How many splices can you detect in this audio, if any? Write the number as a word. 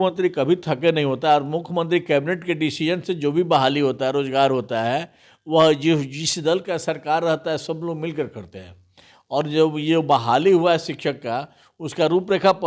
zero